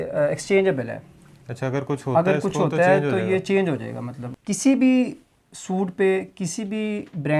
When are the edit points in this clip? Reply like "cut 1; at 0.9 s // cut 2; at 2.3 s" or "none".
cut 1; at 4.2 s